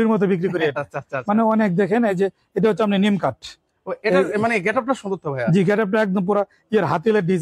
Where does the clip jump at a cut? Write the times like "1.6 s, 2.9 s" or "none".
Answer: none